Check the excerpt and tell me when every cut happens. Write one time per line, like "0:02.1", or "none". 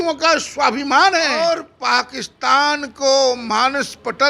0:01.7